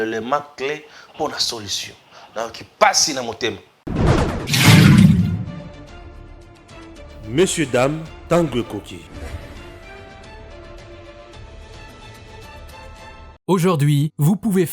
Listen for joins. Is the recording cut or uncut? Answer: cut